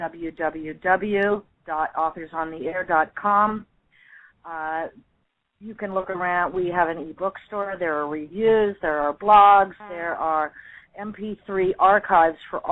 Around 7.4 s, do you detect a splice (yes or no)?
no